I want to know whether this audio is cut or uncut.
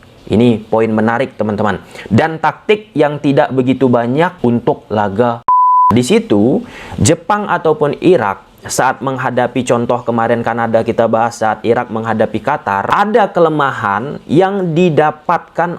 cut